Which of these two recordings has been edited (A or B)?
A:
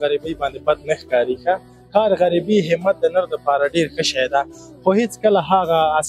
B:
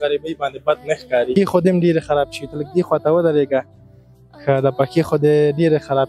B